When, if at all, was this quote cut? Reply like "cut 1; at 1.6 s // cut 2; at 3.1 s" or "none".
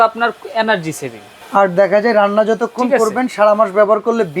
cut 1; at 1.4 s